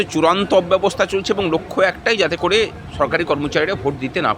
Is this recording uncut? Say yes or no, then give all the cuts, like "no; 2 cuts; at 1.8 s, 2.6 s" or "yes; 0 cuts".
yes; 0 cuts